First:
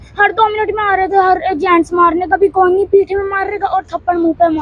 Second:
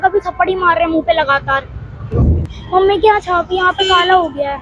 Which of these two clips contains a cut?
second; 1 cut; at 2.3 s

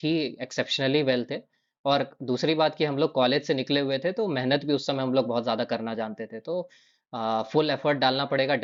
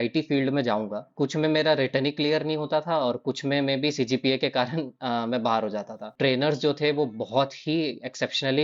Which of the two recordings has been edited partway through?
second; 2 cuts; at 1.0 s, 6.1 s

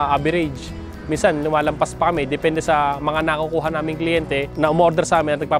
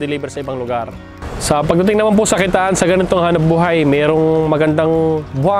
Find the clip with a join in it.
second; 1 cut; at 1.3 s

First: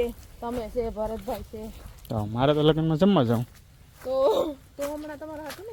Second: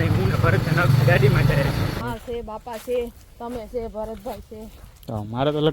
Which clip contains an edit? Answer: second; 1 cut; at 2.0 s

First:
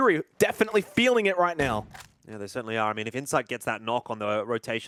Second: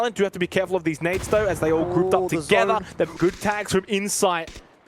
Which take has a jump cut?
second; 1 cut; at 3.1 s

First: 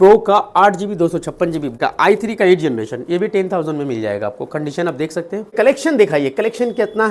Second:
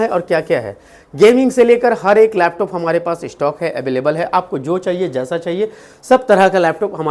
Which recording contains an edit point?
first; 2 cuts; at 1.8 s, 5.5 s

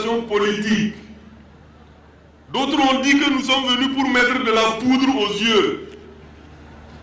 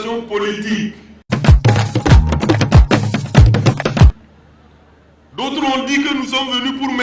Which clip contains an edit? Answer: first; 2 cuts; at 1.3 s, 5.9 s

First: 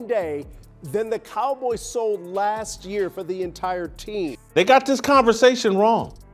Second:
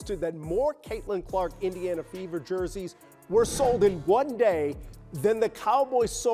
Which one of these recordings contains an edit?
first; 1 cut; at 4.4 s

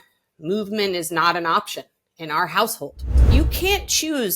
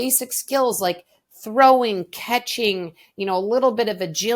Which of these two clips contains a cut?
first; 1 cut; at 3.1 s

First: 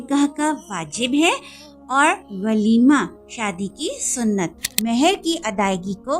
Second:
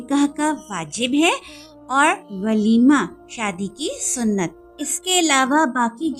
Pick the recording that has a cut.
first; 1 cut; at 4.7 s

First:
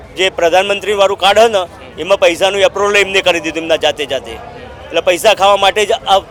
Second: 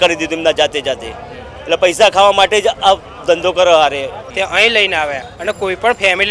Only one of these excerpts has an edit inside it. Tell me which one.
second; 1 cut; at 4.2 s

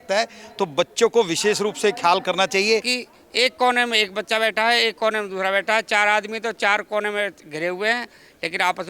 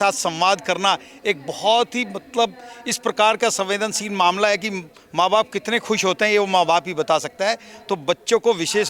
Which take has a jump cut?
first; 1 cut; at 3.0 s

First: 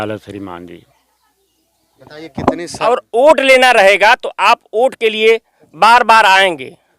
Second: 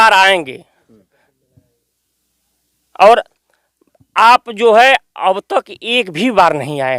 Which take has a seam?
first; 1 cut; at 2.8 s

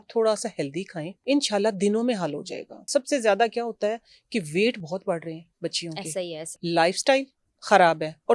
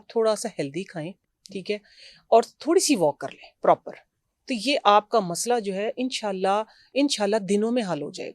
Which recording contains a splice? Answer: first; 3 cuts; at 1.1 s, 2.8 s, 6.5 s

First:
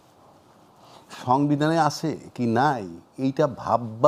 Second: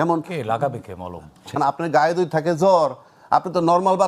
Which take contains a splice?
second; 1 cut; at 1.6 s

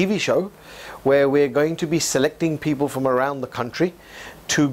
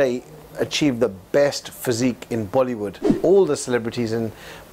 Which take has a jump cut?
second; 1 cut; at 3.1 s

